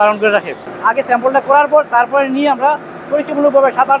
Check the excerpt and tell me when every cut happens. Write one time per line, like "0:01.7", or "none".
0:00.9